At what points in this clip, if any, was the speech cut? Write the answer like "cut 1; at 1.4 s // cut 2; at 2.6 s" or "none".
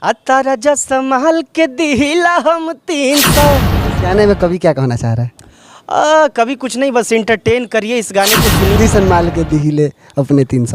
cut 1; at 8.8 s